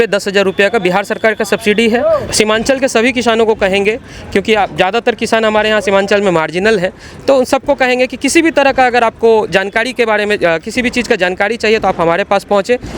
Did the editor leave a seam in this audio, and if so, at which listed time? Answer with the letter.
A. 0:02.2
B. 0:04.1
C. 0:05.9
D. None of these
A